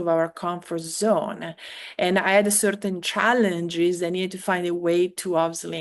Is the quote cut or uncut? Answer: uncut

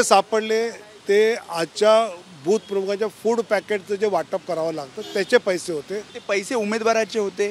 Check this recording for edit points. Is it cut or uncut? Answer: cut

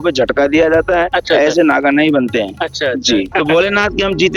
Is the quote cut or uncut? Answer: cut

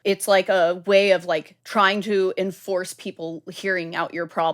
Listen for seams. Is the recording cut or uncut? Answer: cut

